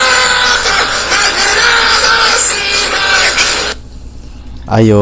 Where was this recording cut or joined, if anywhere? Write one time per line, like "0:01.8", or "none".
none